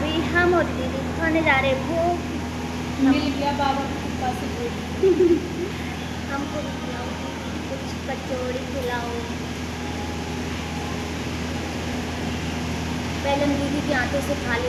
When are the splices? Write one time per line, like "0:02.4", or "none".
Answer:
none